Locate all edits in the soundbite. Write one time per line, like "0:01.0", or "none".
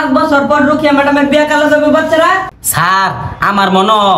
0:02.6